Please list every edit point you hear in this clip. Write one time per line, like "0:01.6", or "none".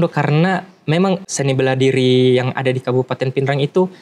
0:01.2